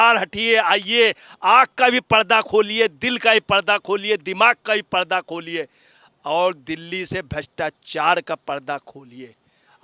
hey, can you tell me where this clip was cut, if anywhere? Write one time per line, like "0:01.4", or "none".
none

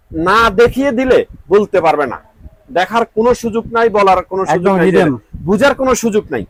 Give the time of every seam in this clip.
none

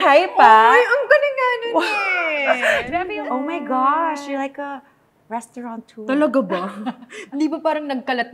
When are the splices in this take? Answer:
0:02.9

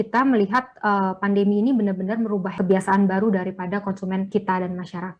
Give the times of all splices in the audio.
0:02.5
0:04.3

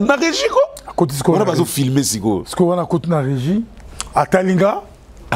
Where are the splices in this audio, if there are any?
none

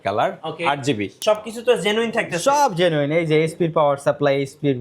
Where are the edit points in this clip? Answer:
0:01.2

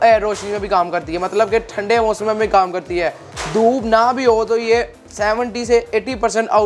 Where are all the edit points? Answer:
none

